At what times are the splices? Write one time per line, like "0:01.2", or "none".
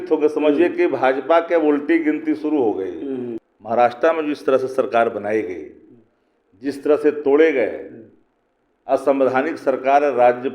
0:03.4